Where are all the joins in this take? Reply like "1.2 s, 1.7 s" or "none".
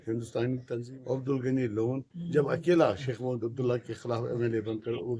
0.9 s

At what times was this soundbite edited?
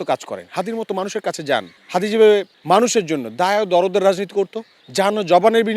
1.8 s, 2.5 s

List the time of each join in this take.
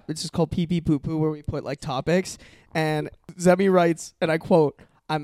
3.2 s

